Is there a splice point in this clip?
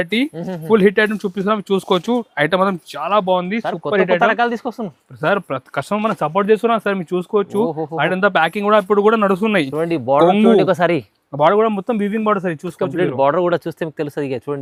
no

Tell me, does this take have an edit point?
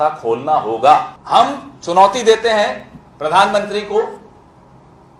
yes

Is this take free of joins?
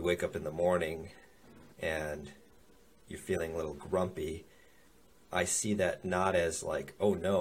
yes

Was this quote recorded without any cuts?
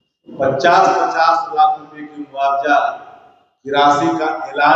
yes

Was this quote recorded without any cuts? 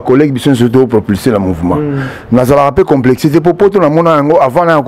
yes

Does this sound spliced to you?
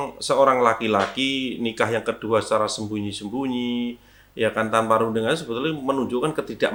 no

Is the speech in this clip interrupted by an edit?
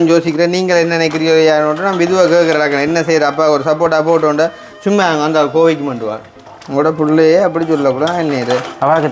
yes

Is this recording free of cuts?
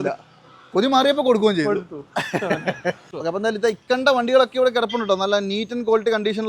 no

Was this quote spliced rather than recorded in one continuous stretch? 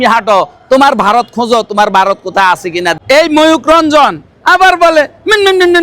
yes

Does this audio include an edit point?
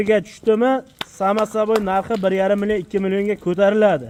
no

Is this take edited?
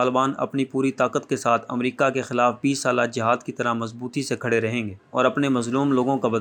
no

